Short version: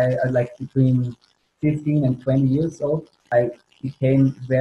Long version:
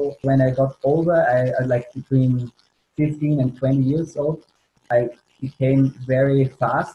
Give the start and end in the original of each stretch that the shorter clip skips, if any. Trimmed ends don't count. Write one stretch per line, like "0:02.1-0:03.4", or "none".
0:04.5-0:04.7